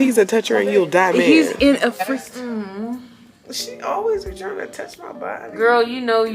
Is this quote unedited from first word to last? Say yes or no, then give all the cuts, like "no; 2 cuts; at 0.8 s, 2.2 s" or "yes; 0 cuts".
no; 1 cut; at 2.1 s